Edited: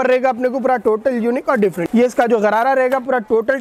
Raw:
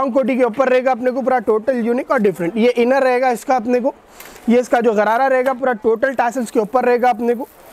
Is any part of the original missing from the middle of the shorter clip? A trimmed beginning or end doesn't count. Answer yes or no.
yes